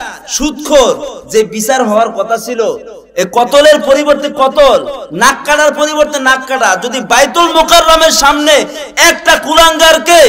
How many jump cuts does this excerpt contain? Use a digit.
0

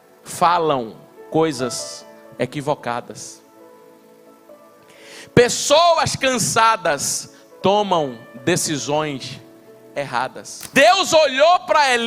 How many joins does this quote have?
1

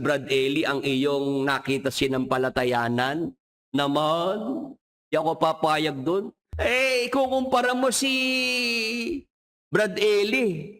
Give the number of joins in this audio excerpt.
1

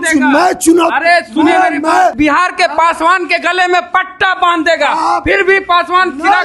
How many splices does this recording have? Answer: 1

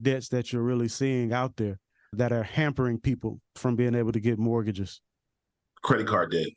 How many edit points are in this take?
1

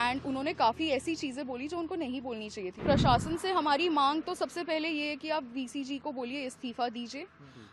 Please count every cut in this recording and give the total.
1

